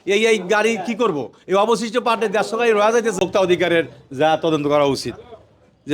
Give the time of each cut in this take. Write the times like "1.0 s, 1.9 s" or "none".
3.2 s